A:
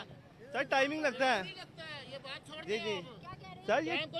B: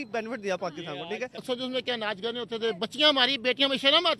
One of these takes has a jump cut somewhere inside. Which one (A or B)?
B